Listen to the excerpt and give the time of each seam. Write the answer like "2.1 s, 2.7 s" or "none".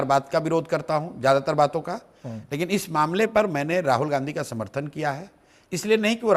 none